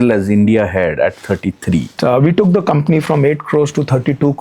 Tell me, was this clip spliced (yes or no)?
yes